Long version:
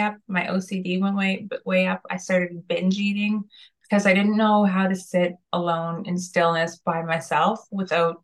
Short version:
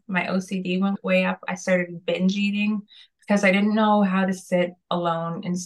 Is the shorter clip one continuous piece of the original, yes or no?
no